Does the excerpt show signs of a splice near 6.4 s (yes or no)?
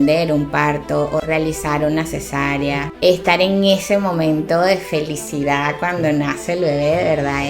no